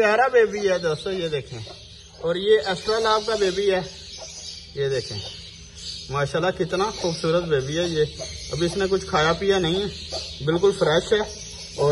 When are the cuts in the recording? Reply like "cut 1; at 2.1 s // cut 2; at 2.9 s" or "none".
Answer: none